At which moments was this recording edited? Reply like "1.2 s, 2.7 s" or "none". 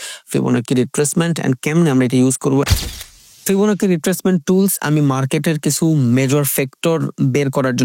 2.9 s